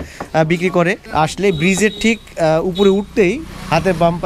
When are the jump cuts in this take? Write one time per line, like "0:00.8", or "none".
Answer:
0:01.0